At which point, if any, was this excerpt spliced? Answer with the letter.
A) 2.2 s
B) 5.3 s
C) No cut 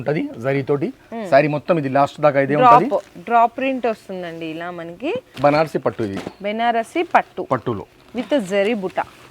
B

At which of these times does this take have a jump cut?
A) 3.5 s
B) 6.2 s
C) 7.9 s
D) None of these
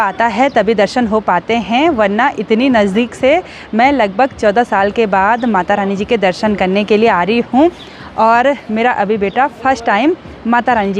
D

